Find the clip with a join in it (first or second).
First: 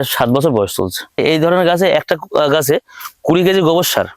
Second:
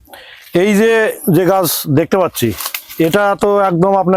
first